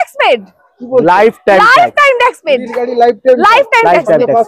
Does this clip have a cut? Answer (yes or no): no